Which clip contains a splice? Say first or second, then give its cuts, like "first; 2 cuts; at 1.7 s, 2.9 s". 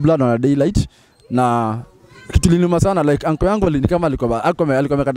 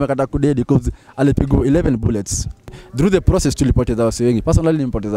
second; 1 cut; at 2.8 s